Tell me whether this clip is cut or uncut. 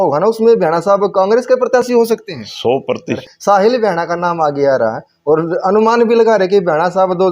cut